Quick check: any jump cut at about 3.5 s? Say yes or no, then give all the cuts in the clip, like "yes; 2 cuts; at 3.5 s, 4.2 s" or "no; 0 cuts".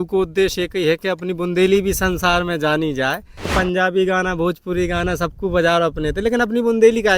yes; 1 cut; at 3.5 s